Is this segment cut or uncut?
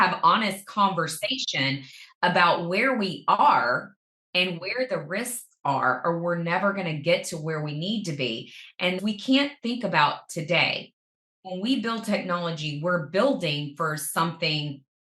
cut